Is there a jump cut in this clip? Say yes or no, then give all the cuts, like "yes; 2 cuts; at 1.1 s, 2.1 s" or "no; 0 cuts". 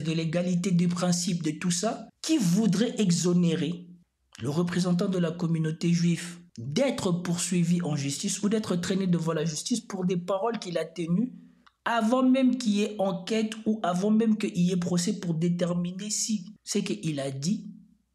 yes; 1 cut; at 2.1 s